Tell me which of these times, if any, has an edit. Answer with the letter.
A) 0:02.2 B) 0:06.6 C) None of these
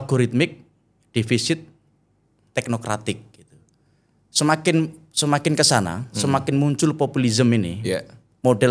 C